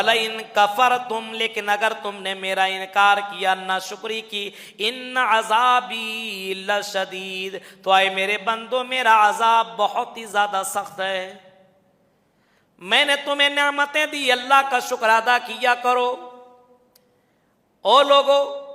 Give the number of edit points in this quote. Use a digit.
0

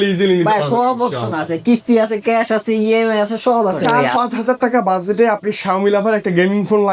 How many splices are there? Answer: 1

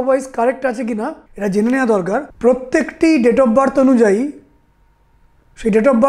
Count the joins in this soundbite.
2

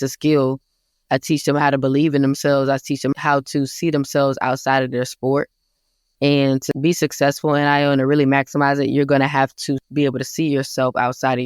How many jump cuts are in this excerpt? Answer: 3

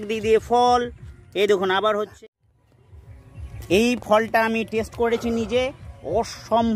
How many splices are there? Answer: 1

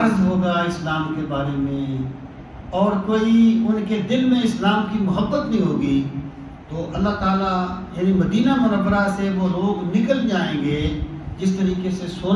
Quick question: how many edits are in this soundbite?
0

